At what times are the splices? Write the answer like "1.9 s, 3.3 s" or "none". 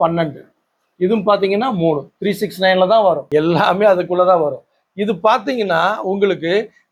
none